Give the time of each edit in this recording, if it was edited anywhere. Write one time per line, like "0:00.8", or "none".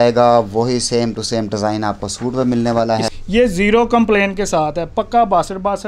0:03.1